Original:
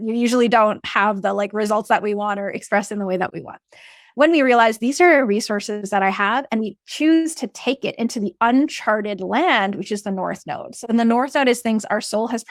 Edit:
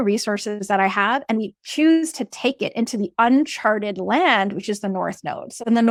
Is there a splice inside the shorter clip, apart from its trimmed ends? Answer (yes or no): no